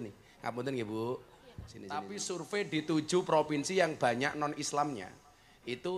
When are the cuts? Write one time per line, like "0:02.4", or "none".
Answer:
0:02.0

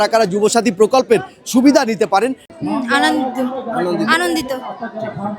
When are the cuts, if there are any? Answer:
0:02.4

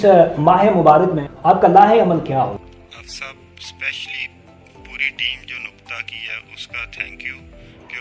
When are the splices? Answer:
0:02.6

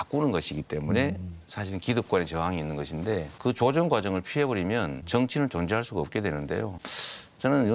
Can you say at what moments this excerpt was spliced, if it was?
none

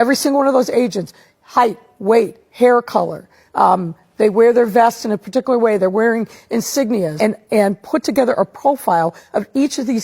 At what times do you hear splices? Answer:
0:07.1

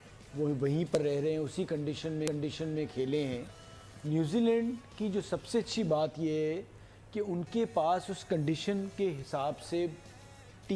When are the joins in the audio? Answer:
none

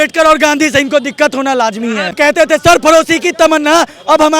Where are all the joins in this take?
0:02.1

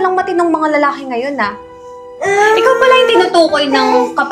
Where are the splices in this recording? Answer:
0:02.0

